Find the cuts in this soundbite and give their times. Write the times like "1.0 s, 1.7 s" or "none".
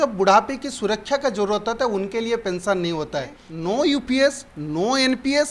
3.4 s